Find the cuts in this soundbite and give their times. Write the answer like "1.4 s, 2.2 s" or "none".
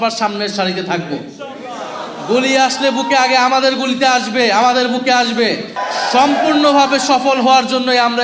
5.8 s